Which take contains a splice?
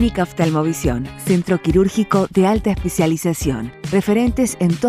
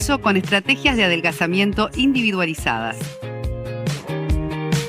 second; 1 cut; at 3.0 s

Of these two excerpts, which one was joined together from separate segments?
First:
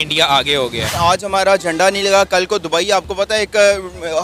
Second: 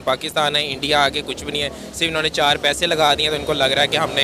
first; 1 cut; at 0.9 s

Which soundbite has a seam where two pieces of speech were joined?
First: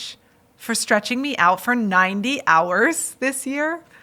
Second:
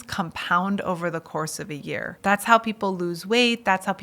second; 1 cut; at 2.1 s

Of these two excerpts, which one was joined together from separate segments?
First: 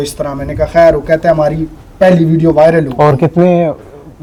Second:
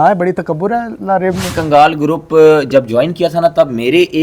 second; 1 cut; at 1.5 s

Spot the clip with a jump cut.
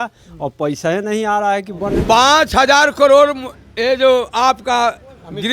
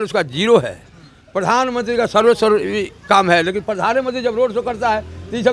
first; 1 cut; at 2.0 s

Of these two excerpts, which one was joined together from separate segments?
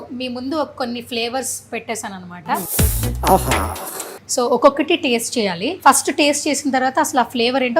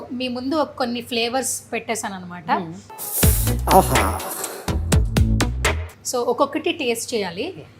first; 3 cuts; at 2.7 s, 4.2 s, 5.7 s

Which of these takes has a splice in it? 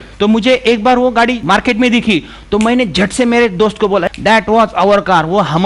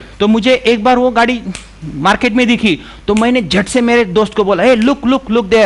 first; 2 cuts; at 1.4 s, 4.0 s

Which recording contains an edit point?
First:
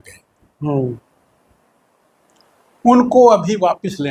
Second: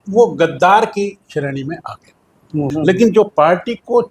second; 1 cut; at 2.7 s

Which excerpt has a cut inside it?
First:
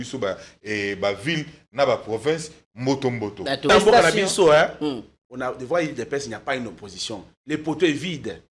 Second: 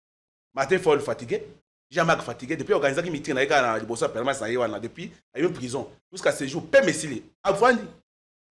first; 1 cut; at 3.7 s

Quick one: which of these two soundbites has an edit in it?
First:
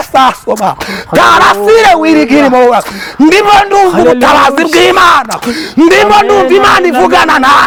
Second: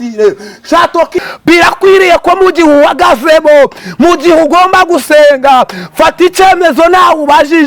second; 1 cut; at 1.1 s

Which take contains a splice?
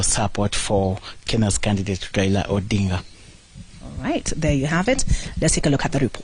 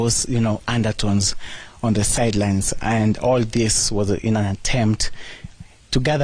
second; 1 cut; at 3.8 s

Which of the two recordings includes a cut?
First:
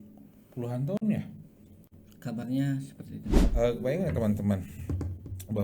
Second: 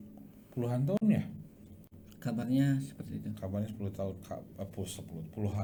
first; 1 cut; at 3.4 s

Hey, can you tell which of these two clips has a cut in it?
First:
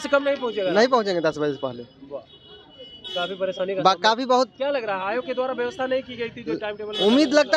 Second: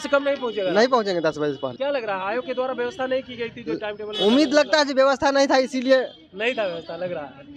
second; 1 cut; at 1.7 s

